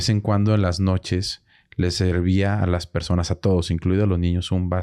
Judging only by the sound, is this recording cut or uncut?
uncut